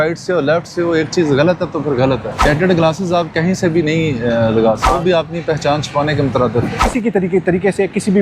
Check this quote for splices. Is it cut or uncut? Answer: cut